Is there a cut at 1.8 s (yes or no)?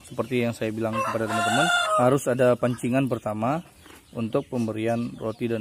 yes